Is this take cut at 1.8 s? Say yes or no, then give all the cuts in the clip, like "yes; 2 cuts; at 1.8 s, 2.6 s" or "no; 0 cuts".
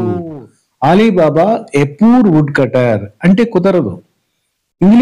no; 0 cuts